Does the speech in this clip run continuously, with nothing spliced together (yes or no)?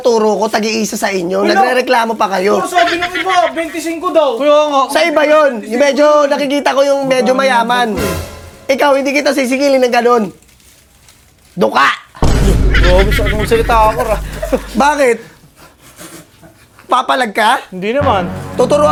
yes